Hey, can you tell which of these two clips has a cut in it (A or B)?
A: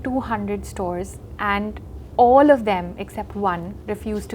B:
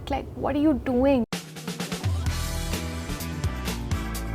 B